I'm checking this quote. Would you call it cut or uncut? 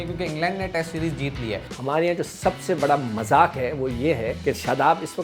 cut